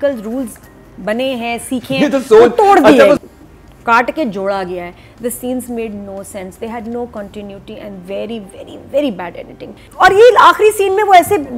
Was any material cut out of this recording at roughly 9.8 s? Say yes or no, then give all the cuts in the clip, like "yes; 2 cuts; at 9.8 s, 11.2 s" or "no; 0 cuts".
yes; 2 cuts; at 3.2 s, 9.8 s